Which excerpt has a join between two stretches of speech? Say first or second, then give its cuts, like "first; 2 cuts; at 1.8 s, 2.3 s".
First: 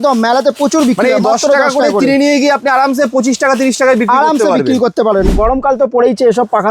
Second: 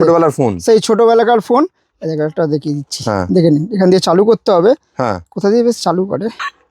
first; 1 cut; at 5.3 s